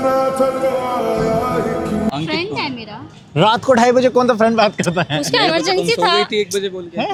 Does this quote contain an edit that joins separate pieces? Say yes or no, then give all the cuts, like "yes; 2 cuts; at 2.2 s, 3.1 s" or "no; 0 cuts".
no; 0 cuts